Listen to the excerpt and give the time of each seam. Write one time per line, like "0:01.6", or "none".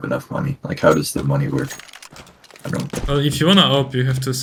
none